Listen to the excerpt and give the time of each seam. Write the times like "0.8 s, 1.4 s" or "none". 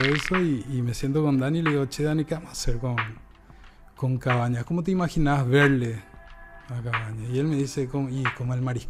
none